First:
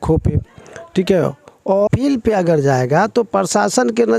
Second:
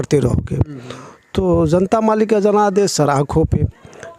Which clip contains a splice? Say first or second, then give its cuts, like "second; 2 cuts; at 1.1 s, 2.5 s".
first; 1 cut; at 1.9 s